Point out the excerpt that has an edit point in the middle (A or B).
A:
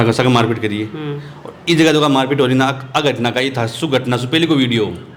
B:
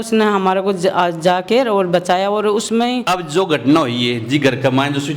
B